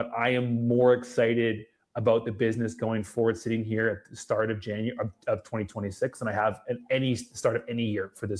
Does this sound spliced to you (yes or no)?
no